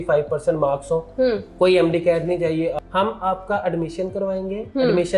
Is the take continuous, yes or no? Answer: no